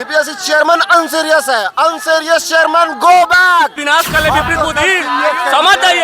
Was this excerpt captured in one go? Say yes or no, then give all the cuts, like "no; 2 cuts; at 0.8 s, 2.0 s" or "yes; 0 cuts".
no; 1 cut; at 3.8 s